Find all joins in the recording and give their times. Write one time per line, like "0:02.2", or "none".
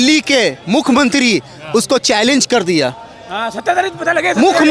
none